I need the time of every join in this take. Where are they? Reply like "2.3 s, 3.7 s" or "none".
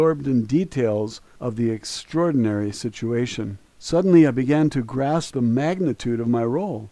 1.3 s